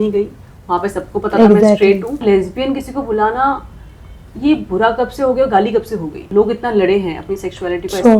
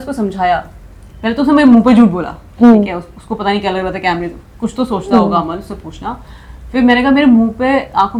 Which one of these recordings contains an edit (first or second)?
first